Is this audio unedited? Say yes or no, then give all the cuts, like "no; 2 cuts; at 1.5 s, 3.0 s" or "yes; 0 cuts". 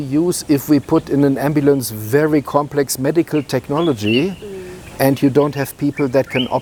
yes; 0 cuts